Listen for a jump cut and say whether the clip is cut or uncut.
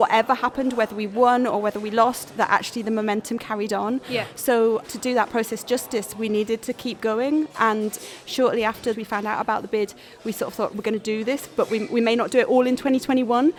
uncut